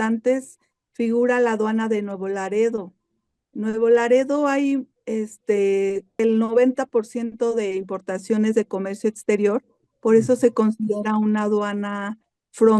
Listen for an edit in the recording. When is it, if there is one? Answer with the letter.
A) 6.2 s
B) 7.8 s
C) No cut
A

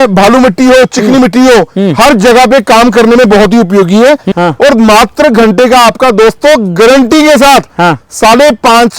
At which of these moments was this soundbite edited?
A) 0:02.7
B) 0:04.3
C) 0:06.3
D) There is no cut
B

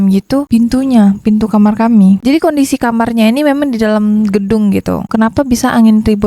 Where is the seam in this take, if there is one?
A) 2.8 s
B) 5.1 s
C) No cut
B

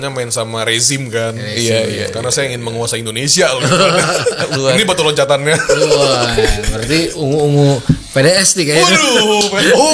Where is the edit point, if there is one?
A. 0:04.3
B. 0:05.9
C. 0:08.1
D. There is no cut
D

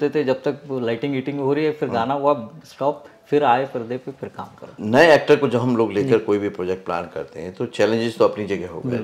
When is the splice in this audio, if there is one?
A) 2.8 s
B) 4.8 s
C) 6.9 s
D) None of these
B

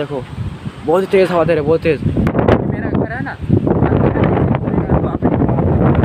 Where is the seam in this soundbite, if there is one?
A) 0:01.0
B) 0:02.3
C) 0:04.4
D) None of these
B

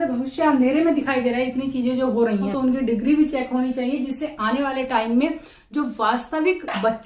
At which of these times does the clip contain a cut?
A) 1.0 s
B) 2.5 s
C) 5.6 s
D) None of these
B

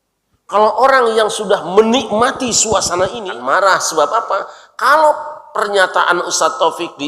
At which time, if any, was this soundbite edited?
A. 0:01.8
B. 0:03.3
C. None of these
B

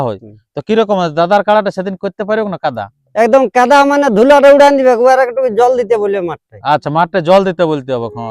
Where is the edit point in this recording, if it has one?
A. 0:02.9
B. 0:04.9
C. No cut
C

